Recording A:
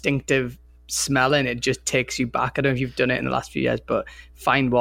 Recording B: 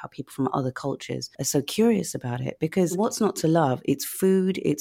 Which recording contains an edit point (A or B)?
B